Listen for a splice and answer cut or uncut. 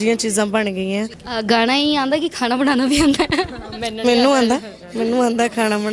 cut